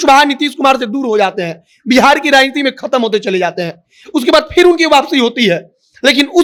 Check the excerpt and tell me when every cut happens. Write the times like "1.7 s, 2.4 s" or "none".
none